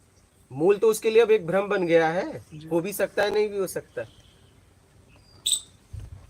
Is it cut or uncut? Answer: uncut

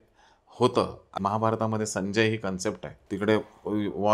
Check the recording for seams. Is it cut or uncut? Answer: cut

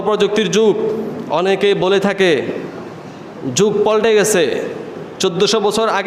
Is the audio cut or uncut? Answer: uncut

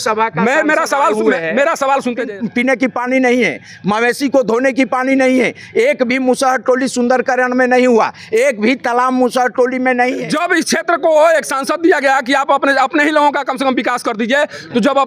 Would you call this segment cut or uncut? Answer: cut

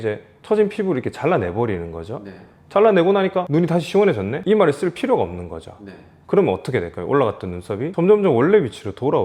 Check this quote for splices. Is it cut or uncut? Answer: uncut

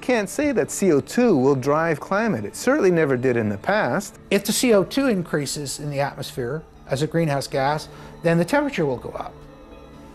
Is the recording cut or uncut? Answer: cut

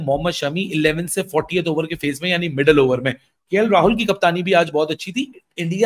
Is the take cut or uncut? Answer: uncut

